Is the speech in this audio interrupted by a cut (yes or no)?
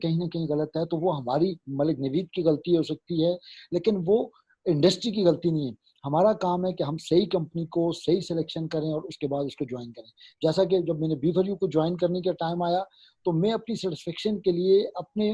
no